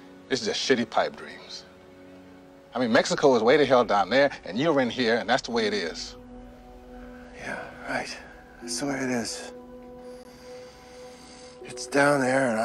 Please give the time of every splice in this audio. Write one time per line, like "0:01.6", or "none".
0:02.1